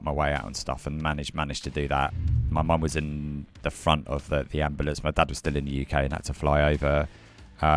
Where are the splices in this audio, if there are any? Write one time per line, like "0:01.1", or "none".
0:02.1